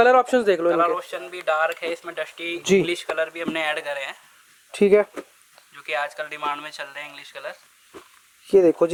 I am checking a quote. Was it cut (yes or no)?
no